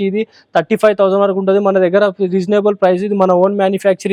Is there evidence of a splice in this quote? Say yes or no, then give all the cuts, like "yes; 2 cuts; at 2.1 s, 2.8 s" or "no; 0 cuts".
no; 0 cuts